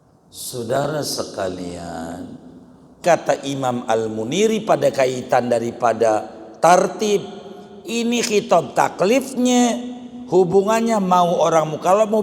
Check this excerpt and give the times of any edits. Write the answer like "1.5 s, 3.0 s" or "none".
3.0 s